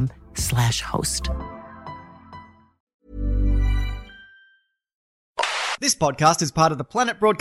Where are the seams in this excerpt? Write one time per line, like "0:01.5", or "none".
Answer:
0:02.9
0:05.2